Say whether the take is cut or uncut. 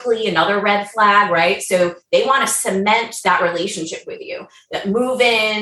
uncut